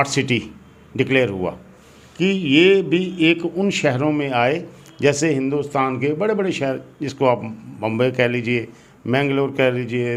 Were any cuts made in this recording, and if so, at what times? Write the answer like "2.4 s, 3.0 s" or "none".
none